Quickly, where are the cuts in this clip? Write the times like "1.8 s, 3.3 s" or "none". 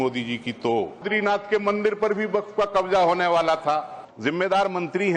1.0 s, 4.0 s